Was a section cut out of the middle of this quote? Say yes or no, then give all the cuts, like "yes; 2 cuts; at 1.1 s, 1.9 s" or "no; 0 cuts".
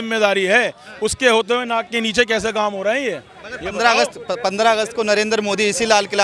no; 0 cuts